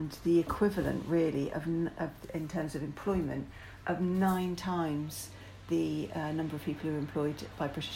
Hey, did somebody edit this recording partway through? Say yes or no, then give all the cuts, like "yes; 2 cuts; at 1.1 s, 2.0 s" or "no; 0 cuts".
no; 0 cuts